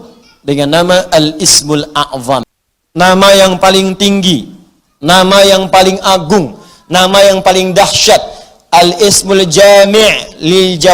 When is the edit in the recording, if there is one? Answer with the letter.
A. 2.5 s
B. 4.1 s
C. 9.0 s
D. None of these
A